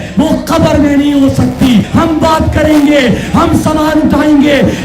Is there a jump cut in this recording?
yes; 1 cut; at 1.9 s

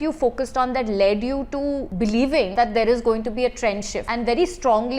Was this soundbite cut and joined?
yes; 3 cuts; at 1.9 s, 2.5 s, 4.0 s

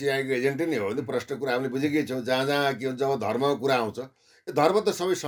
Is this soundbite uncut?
yes; 0 cuts

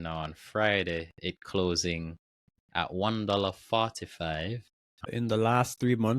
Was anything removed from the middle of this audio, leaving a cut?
yes; 1 cut; at 5.1 s

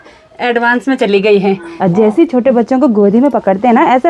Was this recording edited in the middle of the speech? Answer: yes; 1 cut; at 1.7 s

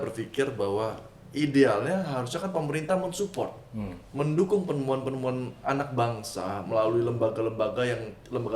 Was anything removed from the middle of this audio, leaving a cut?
no; 0 cuts

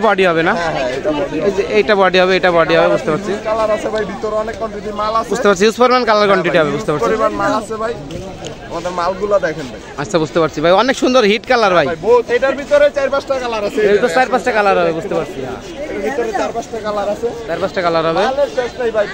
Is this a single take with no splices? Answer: yes; 0 cuts

